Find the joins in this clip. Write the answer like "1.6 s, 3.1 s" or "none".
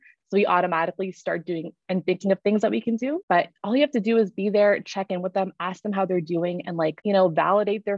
3.2 s, 7.0 s